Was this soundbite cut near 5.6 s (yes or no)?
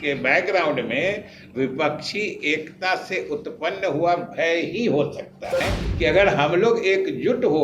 yes